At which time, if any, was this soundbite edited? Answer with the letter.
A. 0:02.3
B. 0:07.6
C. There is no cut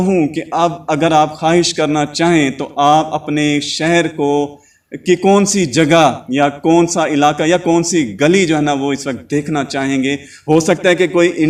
C